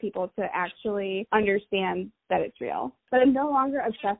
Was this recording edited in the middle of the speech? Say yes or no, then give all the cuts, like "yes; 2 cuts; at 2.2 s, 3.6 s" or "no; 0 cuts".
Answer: yes; 2 cuts; at 1.3 s, 3.0 s